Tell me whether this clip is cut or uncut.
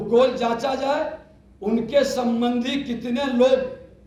uncut